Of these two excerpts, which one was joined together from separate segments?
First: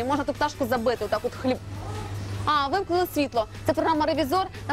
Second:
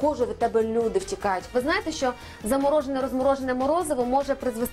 second; 1 cut; at 1.5 s

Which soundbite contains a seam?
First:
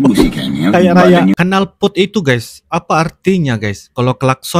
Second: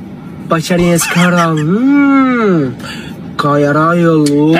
first; 1 cut; at 1.3 s

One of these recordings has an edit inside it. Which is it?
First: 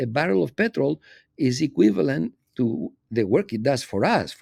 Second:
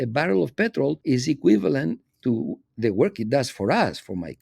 second; 1 cut; at 1.0 s

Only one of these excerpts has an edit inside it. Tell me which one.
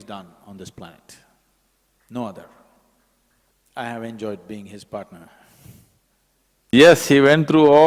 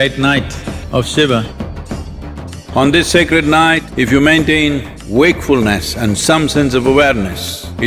first; 1 cut; at 6.7 s

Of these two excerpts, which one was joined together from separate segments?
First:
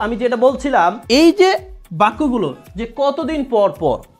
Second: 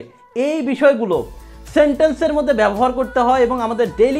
first; 1 cut; at 1.0 s

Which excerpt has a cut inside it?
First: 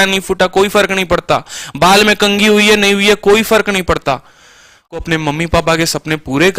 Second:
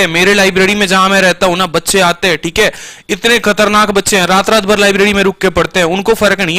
first; 1 cut; at 5.0 s

